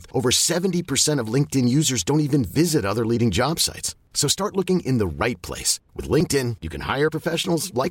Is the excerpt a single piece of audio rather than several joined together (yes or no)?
yes